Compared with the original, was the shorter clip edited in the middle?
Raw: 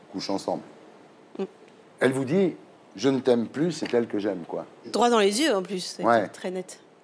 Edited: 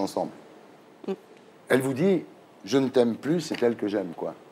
no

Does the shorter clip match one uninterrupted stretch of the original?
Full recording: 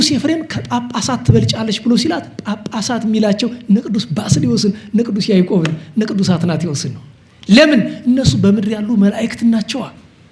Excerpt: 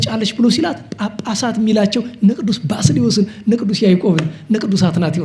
yes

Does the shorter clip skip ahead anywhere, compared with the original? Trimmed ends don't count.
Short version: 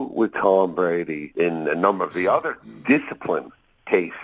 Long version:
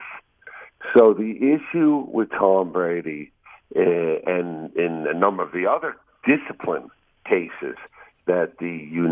yes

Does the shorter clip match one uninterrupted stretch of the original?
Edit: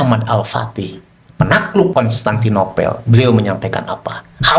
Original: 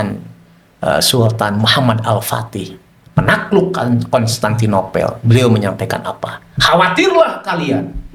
no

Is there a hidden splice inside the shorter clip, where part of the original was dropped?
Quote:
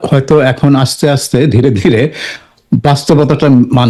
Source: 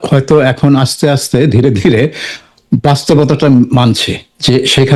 no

